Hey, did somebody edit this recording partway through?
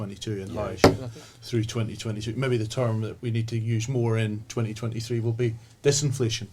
yes; 1 cut; at 1.1 s

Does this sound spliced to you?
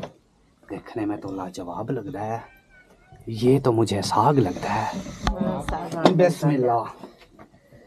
yes; 1 cut; at 5.8 s

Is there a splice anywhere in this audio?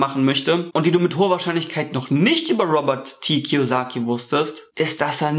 no; 0 cuts

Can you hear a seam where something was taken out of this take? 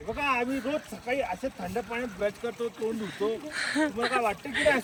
no; 0 cuts

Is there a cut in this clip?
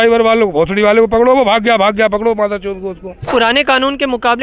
yes; 1 cut; at 3.3 s

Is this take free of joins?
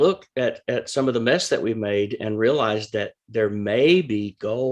yes; 0 cuts

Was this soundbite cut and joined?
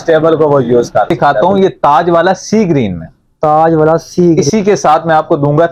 yes; 2 cuts; at 1.1 s, 4.4 s

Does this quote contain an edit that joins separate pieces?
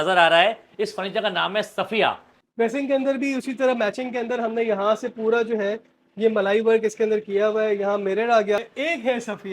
yes; 2 cuts; at 2.3 s, 8.7 s

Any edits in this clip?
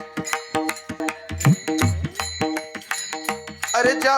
yes; 1 cut; at 1.0 s

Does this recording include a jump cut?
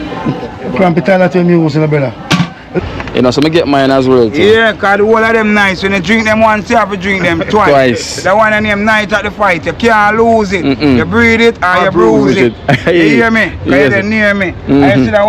yes; 1 cut; at 2.7 s

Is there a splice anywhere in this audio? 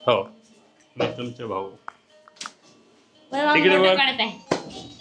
no; 0 cuts

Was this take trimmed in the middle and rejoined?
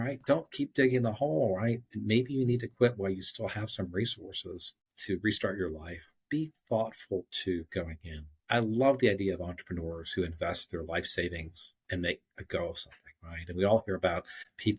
yes; 2 cuts; at 6.2 s, 8.3 s

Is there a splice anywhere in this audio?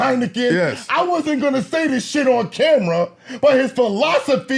no; 0 cuts

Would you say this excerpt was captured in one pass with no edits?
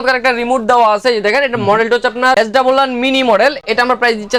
yes; 0 cuts

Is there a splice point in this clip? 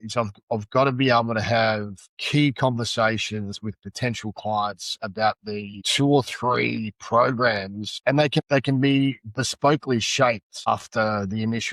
no; 0 cuts

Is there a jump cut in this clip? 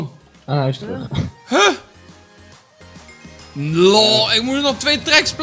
no; 0 cuts

